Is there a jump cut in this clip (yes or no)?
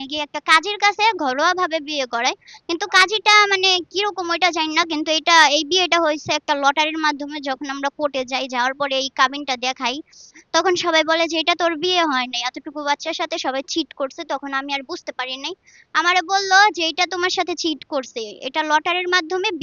no